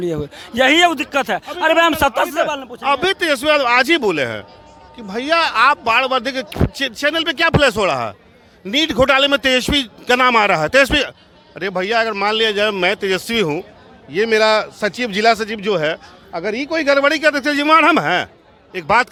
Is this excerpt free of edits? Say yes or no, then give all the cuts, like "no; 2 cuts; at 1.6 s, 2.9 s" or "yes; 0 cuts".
yes; 0 cuts